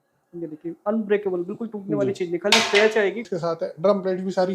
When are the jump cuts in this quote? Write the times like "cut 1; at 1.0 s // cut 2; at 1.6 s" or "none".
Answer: cut 1; at 3.3 s